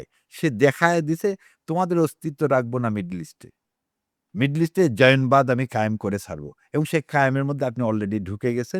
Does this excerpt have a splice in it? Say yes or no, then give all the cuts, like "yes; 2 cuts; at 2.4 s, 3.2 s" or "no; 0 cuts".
no; 0 cuts